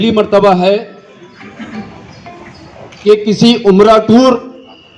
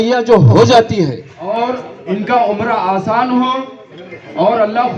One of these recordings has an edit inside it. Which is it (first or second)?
second